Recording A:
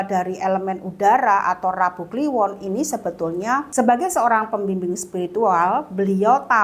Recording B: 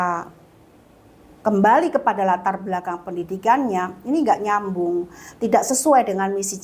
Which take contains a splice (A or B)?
A